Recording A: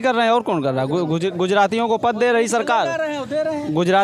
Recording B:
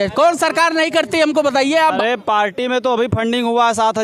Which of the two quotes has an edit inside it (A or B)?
B